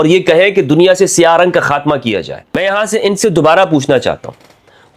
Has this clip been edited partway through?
yes; 1 cut; at 2.6 s

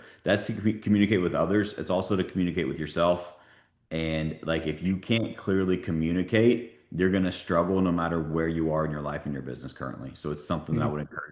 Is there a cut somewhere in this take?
no; 0 cuts

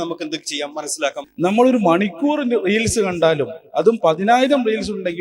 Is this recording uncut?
no; 1 cut; at 1.2 s

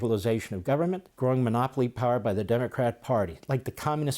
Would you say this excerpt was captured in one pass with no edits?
no; 1 cut; at 1.1 s

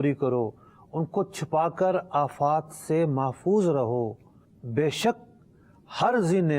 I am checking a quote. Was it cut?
no; 0 cuts

